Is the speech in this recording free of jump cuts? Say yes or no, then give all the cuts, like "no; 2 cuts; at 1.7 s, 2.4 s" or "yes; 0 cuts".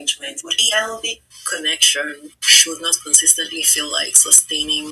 yes; 0 cuts